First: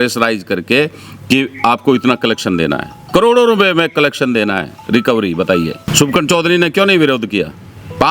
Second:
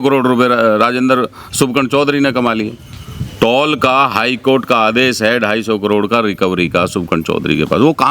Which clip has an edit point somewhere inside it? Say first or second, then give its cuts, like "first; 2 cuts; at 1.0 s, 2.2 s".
first; 1 cut; at 5.9 s